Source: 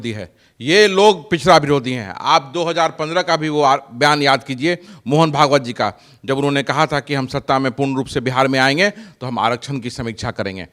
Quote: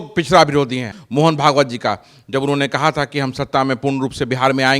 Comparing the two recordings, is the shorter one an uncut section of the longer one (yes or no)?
no